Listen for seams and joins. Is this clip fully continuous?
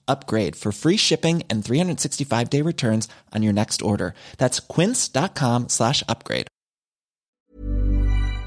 no; 1 cut; at 7.5 s

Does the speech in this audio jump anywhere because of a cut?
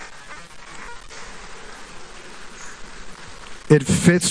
no; 0 cuts

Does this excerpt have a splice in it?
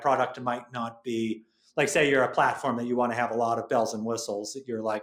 no; 0 cuts

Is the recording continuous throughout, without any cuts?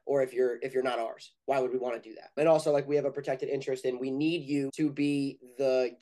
no; 2 cuts; at 2.4 s, 4.7 s

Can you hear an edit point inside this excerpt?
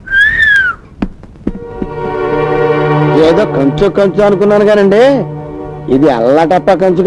no; 0 cuts

